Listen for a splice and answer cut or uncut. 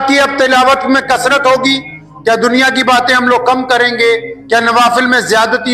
uncut